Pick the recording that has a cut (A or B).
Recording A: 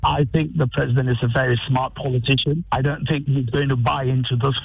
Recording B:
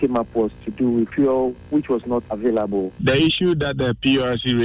B